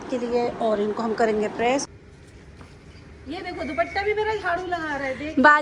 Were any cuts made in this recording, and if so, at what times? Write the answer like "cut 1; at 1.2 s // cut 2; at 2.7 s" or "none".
cut 1; at 1.9 s